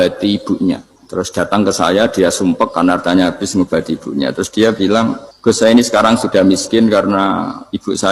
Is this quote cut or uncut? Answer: cut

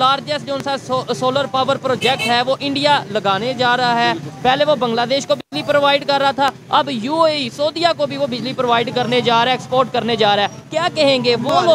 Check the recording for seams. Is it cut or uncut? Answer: uncut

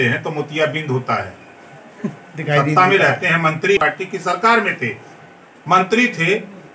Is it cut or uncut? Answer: uncut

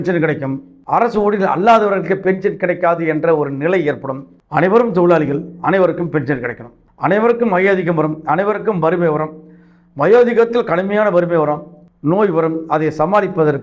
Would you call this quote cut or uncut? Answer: cut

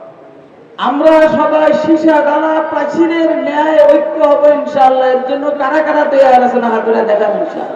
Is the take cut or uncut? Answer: uncut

